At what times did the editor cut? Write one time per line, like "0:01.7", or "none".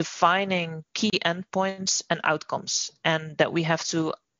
none